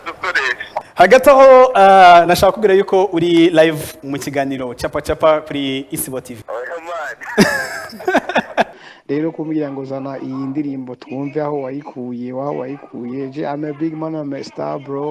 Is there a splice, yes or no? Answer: yes